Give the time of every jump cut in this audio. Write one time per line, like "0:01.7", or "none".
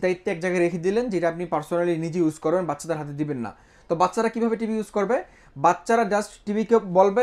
none